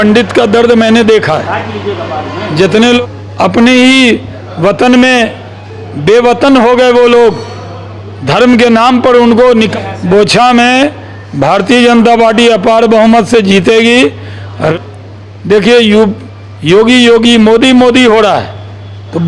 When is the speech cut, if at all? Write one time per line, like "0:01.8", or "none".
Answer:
0:03.0
0:09.7
0:14.7